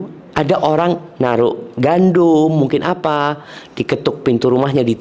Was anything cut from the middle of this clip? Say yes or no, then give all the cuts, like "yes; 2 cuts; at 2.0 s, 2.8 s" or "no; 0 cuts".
no; 0 cuts